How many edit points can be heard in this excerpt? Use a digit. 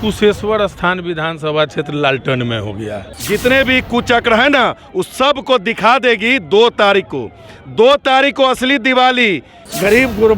2